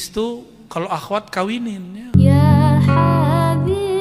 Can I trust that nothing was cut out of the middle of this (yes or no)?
no